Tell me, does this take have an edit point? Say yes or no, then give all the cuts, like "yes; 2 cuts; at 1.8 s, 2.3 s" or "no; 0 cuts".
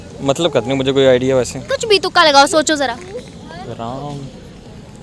no; 0 cuts